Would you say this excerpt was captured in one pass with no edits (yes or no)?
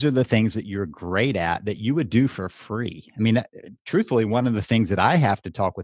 yes